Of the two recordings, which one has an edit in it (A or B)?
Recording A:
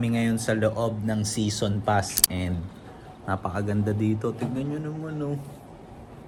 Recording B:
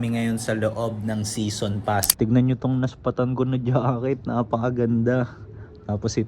B